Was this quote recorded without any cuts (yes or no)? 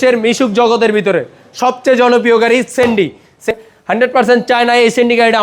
no